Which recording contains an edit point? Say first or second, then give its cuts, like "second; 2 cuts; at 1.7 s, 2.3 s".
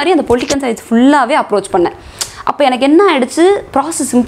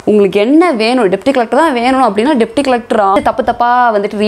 second; 1 cut; at 3.2 s